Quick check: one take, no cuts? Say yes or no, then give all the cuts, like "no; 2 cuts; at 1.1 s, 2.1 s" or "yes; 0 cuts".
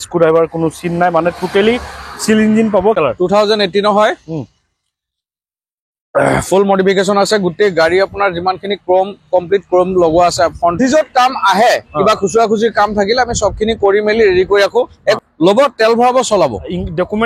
no; 3 cuts; at 3.0 s, 10.8 s, 15.2 s